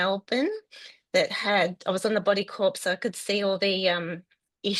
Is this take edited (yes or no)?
no